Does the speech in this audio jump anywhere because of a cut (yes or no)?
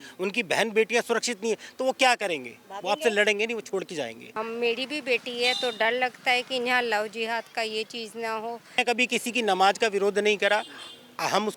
yes